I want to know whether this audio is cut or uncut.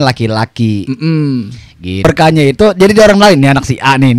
cut